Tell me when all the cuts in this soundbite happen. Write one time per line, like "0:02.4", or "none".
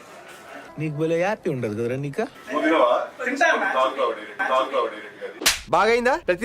0:02.4
0:04.3